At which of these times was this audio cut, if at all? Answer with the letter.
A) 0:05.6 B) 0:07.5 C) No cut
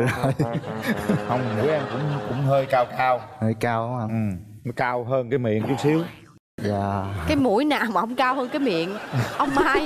C